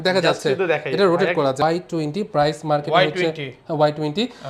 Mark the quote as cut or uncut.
cut